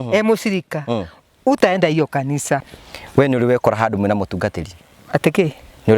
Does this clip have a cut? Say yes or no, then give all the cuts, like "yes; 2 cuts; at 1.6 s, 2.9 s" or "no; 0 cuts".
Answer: yes; 1 cut; at 2.7 s